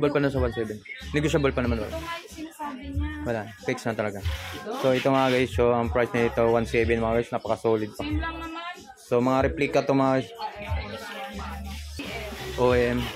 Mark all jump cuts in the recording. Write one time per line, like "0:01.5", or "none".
0:12.0